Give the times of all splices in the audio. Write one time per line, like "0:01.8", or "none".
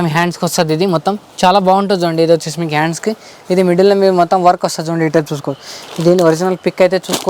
none